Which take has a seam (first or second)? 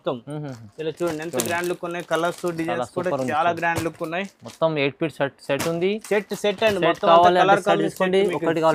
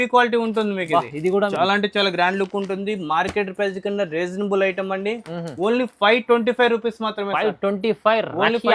second